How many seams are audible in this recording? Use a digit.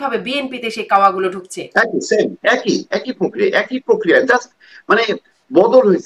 0